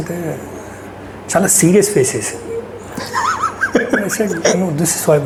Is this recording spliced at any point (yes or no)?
no